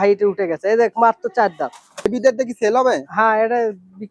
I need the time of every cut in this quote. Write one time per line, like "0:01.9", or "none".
0:02.1